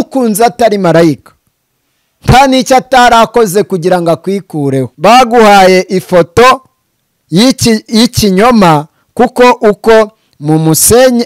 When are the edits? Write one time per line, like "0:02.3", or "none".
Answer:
0:04.9